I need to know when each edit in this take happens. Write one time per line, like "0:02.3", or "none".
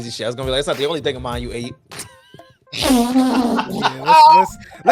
none